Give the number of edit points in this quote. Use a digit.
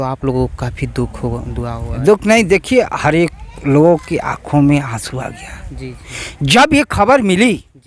0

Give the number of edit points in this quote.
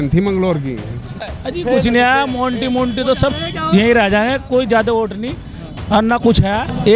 1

